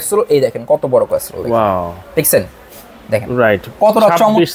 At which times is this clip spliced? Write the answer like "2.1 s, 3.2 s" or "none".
none